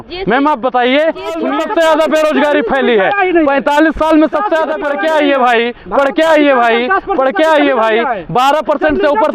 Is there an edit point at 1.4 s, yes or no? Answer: yes